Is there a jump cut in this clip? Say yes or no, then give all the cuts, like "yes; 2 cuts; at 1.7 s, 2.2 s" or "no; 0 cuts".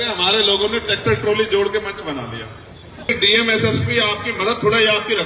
yes; 1 cut; at 3.1 s